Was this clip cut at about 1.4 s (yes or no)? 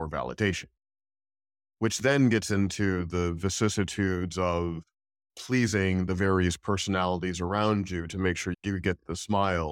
no